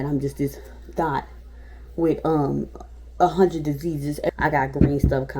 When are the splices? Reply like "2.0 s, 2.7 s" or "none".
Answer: 4.3 s